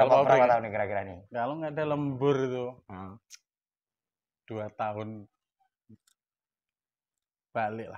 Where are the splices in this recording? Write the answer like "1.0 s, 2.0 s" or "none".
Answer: none